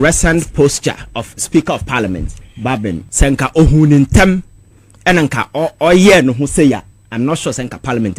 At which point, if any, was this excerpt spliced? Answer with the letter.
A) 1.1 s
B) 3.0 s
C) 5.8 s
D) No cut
B